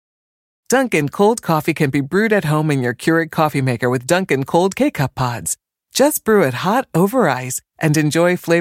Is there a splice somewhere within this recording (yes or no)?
no